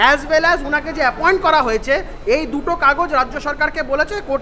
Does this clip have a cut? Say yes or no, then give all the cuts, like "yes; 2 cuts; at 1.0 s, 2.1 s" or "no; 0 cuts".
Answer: no; 0 cuts